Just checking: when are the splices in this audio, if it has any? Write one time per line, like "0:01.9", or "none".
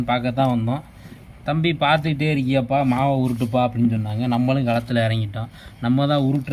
none